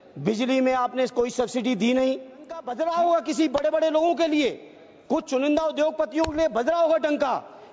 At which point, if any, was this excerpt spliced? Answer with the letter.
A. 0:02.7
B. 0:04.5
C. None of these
A